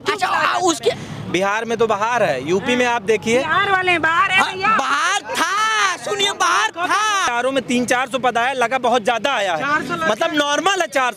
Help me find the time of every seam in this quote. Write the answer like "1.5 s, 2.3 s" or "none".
1.1 s, 7.3 s